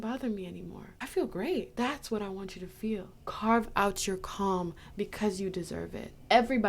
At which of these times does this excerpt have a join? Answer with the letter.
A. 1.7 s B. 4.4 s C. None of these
A